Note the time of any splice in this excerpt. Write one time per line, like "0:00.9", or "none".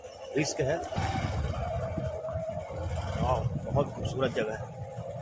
0:01.0